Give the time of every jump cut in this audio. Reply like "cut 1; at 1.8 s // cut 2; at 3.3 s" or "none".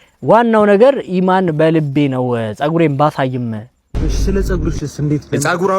cut 1; at 3.8 s

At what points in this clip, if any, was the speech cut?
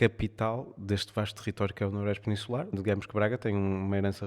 cut 1; at 2.7 s

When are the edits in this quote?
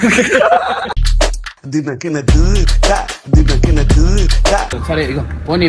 cut 1; at 4.8 s

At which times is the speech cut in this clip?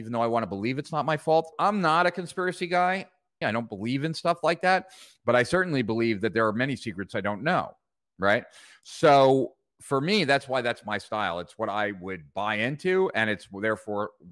cut 1; at 1.5 s // cut 2; at 3.4 s

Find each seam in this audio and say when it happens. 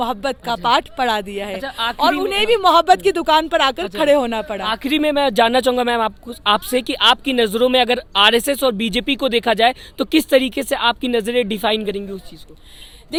none

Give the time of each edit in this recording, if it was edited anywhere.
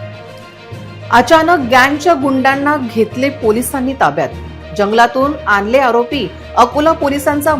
cut 1; at 1.0 s

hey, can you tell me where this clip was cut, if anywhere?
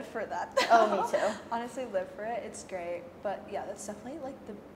none

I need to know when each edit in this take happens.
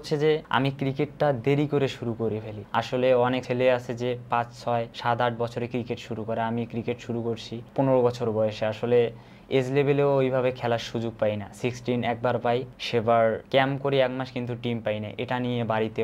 none

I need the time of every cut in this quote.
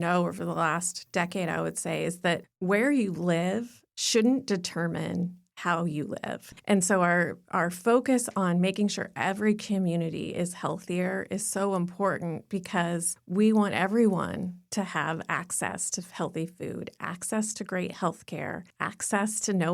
cut 1; at 2.5 s // cut 2; at 6.5 s // cut 3; at 13.2 s // cut 4; at 18.7 s

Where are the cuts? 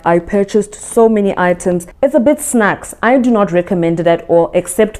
cut 1; at 1.9 s

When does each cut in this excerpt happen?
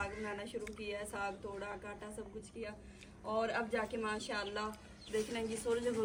none

